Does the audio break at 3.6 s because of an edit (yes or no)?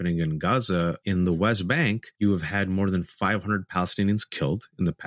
no